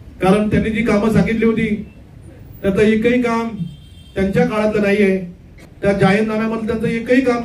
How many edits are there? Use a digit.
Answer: 1